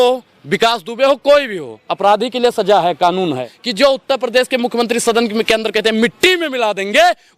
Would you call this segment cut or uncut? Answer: cut